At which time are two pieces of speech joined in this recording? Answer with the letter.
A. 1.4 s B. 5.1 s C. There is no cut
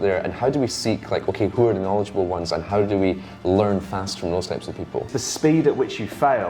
B